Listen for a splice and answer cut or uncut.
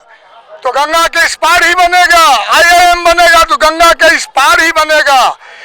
uncut